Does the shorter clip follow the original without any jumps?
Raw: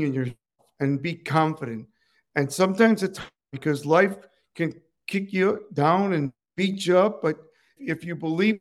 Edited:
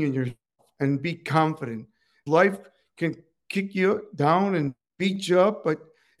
no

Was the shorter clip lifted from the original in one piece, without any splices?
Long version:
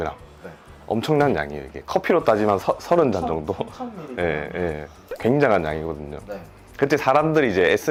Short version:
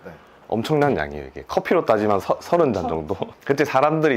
no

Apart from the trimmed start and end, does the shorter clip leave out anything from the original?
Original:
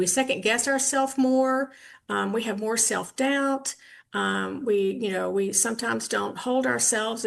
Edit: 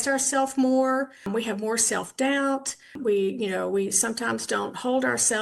yes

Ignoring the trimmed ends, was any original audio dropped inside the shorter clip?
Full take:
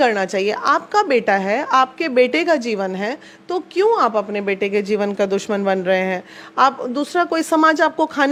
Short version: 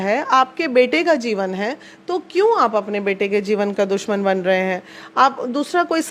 no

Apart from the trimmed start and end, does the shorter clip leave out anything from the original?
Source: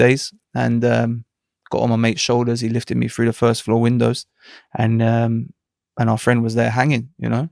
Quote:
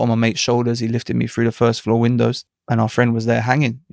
yes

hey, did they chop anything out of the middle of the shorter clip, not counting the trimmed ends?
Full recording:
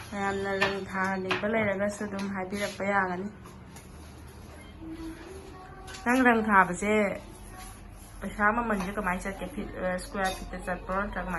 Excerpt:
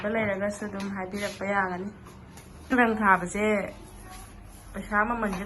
yes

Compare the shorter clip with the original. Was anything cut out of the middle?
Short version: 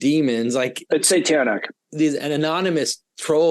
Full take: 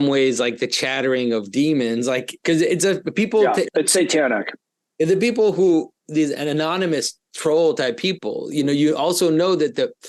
yes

